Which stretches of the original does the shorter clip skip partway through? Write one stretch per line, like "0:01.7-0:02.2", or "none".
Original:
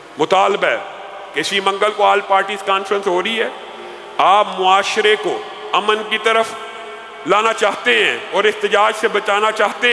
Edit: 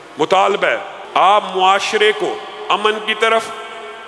0:00.9-0:04.0